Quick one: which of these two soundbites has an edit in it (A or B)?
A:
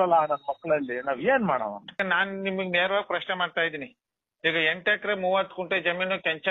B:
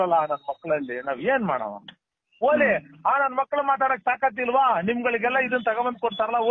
A